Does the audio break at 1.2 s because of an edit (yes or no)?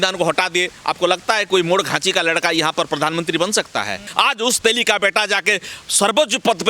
no